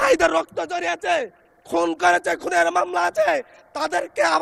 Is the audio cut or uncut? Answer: uncut